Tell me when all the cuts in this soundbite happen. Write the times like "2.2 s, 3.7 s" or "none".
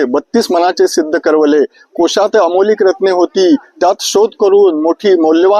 none